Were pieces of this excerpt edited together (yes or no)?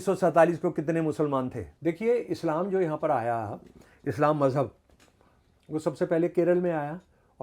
yes